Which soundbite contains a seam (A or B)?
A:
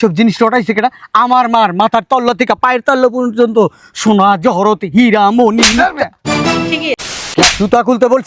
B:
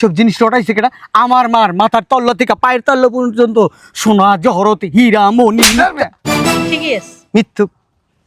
A